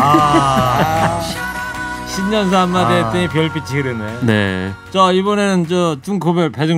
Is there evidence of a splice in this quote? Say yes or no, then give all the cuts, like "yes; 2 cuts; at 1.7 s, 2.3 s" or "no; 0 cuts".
no; 0 cuts